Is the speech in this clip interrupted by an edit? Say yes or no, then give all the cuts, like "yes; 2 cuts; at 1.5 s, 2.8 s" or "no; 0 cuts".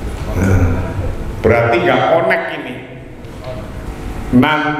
yes; 1 cut; at 3.9 s